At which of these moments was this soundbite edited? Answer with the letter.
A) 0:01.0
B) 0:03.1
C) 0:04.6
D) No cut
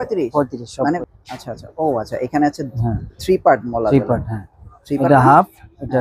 A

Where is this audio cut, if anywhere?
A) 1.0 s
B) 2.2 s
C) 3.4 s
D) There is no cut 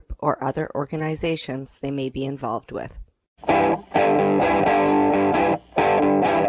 C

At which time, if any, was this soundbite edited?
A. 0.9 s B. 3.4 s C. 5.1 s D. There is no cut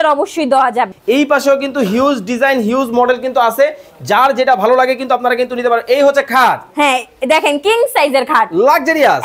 A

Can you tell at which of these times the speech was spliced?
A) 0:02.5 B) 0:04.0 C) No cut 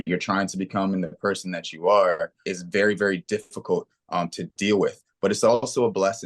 A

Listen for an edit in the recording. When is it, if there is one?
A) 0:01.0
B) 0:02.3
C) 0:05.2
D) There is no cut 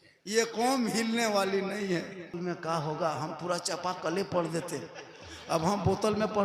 B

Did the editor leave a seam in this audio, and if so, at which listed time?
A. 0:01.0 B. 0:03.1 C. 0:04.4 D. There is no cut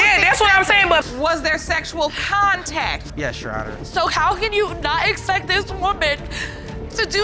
A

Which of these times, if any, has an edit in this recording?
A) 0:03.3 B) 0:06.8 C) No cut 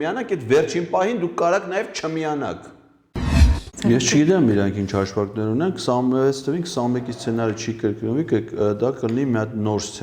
A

